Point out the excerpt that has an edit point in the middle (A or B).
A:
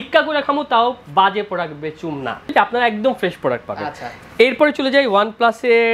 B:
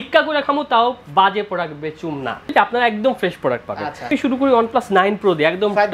B